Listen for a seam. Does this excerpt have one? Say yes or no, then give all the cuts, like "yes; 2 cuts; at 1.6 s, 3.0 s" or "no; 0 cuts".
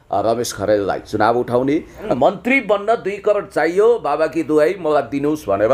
yes; 1 cut; at 2.1 s